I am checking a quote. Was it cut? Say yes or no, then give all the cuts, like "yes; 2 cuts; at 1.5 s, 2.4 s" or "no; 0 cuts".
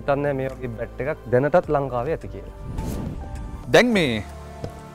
no; 0 cuts